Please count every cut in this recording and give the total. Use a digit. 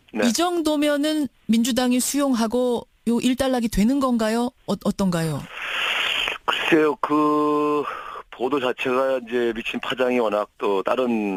0